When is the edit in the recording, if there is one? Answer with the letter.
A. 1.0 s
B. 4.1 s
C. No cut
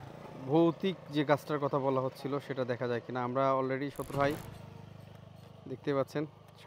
B